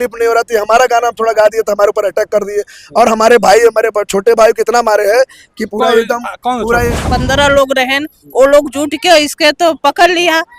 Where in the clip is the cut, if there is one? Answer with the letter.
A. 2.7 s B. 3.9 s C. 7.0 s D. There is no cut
C